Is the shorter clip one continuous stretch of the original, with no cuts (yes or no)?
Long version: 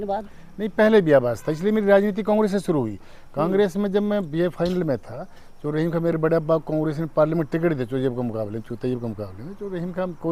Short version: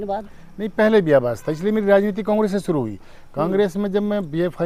yes